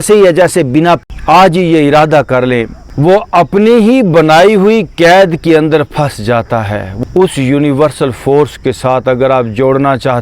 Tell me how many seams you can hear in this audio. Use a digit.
3